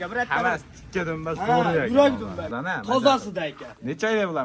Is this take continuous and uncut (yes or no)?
no